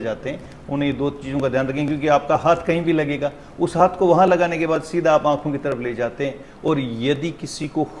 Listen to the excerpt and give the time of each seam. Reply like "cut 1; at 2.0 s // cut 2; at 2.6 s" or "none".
none